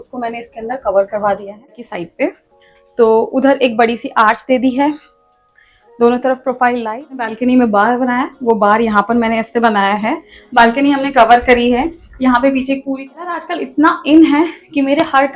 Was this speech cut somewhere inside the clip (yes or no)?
yes